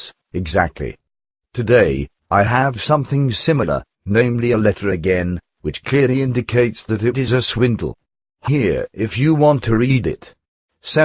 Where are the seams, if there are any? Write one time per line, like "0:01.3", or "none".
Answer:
0:06.0

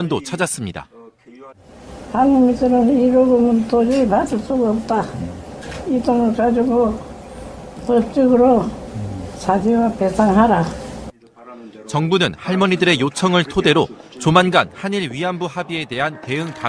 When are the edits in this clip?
0:07.3

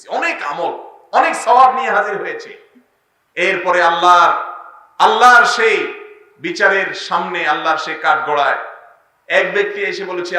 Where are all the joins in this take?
none

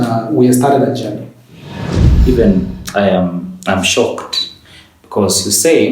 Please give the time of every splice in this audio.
0:02.0

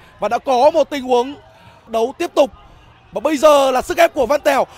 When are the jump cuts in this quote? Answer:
0:01.9

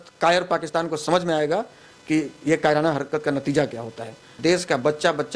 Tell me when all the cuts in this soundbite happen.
0:04.3

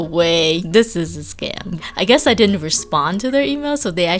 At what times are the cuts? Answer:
0:01.8

